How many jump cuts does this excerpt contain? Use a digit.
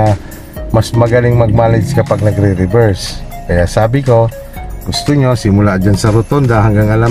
0